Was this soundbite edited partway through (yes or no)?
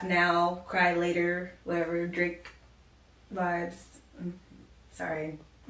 no